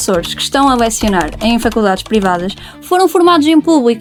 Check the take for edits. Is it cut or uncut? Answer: uncut